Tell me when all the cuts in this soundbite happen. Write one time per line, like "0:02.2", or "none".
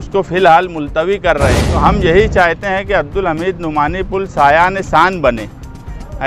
0:01.7